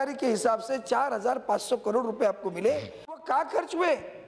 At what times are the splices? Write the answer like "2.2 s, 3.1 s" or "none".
3.2 s